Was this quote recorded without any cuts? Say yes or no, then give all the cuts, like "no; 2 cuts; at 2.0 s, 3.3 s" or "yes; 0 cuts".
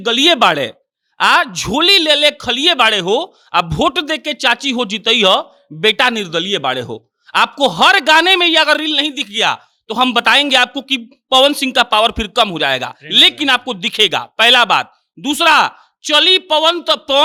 yes; 0 cuts